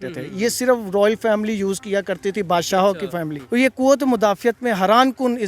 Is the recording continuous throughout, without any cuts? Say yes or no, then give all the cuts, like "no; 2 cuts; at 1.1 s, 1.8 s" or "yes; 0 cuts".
no; 1 cut; at 3.4 s